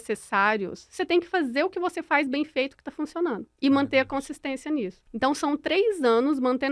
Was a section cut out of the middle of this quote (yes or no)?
yes